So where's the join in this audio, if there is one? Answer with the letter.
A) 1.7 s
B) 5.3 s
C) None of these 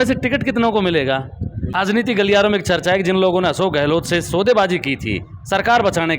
A